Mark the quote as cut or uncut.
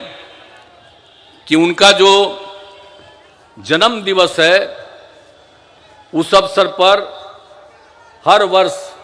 uncut